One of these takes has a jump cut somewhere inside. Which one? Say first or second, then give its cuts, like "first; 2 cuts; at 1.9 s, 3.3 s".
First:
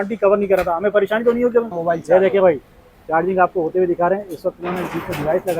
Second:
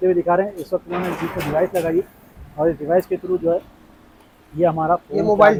first; 1 cut; at 1.8 s